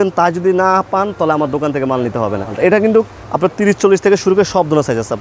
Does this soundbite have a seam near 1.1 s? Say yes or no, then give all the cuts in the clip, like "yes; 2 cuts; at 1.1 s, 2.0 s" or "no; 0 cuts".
no; 1 cut; at 2.5 s